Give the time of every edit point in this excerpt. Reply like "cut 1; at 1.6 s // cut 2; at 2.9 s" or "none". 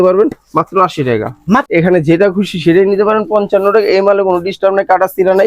cut 1; at 1.6 s